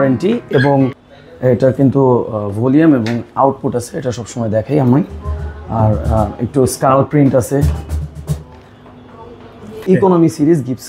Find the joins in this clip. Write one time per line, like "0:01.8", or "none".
0:01.0
0:09.8